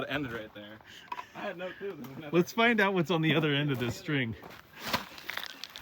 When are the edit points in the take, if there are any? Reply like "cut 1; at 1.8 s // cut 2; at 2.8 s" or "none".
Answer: cut 1; at 4.7 s